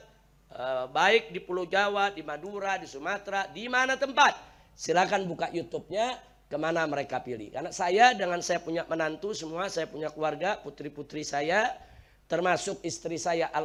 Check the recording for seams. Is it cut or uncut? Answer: uncut